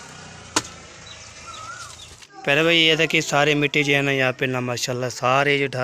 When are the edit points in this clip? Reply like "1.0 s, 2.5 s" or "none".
2.2 s